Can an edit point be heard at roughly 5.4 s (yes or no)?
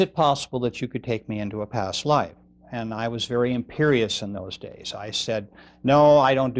no